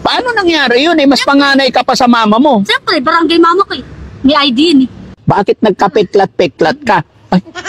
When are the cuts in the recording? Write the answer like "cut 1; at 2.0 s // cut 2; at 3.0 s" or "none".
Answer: cut 1; at 5.1 s